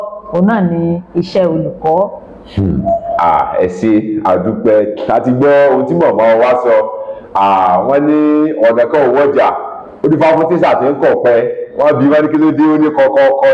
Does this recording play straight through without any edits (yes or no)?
yes